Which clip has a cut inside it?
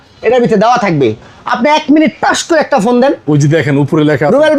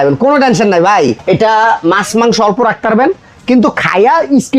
second; 1 cut; at 1.2 s

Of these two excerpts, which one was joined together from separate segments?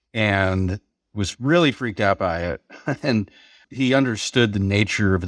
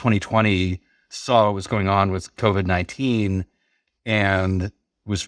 first; 1 cut; at 3.6 s

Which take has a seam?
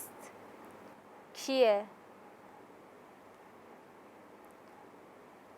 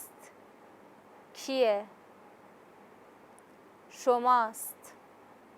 second; 1 cut; at 2.5 s

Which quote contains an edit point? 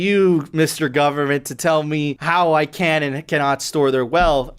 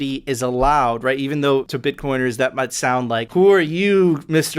second; 1 cut; at 2.8 s

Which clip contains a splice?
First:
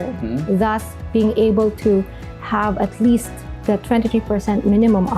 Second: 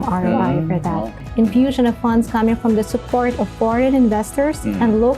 second; 1 cut; at 1.2 s

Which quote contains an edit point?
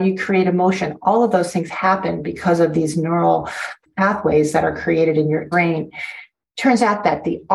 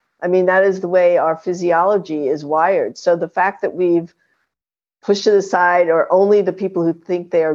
first; 2 cuts; at 3.7 s, 5.5 s

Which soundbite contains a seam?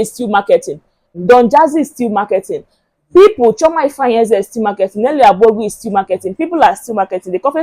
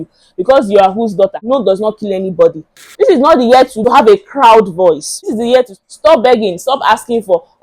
second; 4 cuts; at 1.4 s, 2.8 s, 3.8 s, 5.1 s

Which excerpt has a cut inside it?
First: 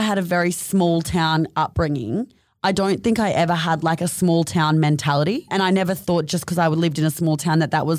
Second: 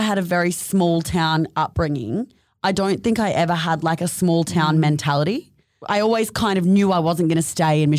first; 1 cut; at 5.5 s

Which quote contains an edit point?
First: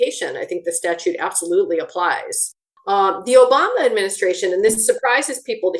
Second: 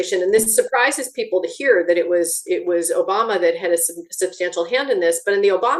first; 1 cut; at 2.5 s

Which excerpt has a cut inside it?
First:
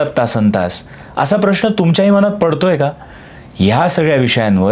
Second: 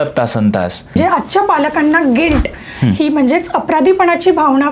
second; 1 cut; at 1.0 s

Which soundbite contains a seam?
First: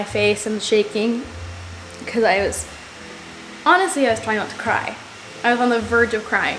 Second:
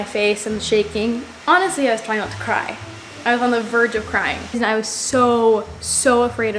second; 2 cuts; at 1.3 s, 4.6 s

